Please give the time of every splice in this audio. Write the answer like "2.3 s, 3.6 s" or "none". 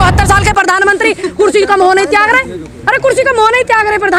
none